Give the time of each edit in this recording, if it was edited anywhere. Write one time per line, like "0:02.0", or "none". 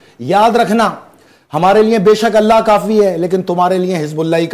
none